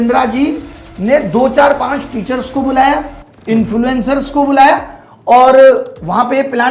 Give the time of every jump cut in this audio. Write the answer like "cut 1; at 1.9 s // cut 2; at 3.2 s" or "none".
none